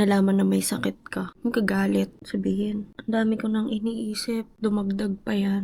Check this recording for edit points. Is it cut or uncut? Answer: cut